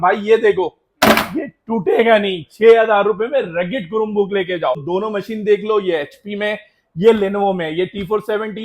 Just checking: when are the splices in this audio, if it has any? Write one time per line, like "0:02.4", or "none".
0:04.8